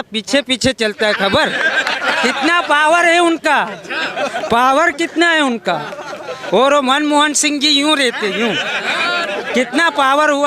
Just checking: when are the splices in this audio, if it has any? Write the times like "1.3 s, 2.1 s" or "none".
none